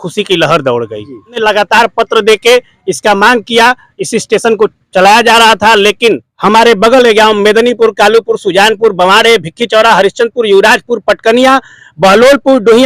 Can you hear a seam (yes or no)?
yes